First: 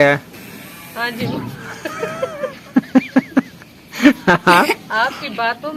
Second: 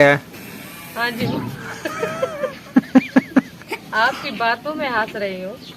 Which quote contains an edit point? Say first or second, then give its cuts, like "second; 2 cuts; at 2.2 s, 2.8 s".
second; 1 cut; at 3.8 s